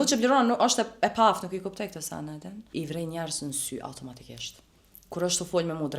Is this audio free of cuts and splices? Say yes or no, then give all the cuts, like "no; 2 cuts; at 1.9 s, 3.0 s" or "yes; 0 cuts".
no; 1 cut; at 2.6 s